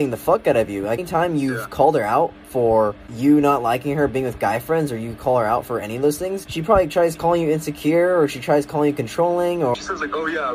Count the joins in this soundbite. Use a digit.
4